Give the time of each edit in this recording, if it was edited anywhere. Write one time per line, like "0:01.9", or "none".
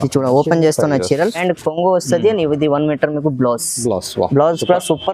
0:01.4